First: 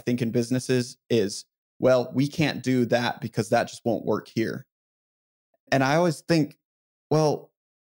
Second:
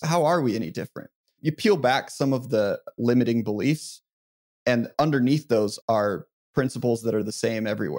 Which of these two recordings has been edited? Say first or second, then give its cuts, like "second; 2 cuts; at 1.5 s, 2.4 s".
second; 1 cut; at 4.9 s